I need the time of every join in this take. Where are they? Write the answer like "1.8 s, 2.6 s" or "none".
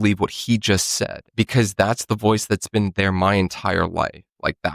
1.3 s